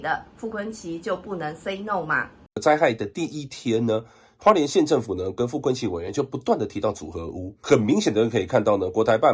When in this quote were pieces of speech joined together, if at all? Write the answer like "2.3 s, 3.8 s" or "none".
2.6 s, 7.6 s